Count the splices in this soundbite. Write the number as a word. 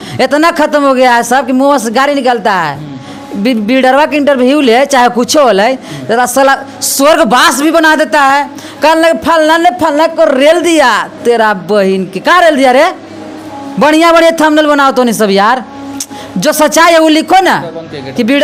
zero